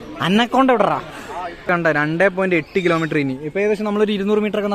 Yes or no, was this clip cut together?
yes